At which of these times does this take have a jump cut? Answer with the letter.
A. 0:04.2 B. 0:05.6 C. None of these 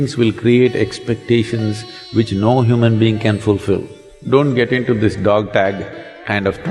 A